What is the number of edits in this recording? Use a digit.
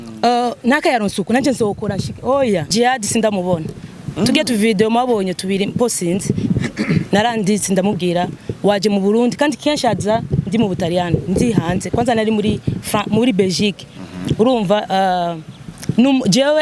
1